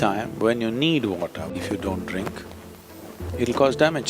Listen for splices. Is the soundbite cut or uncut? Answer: cut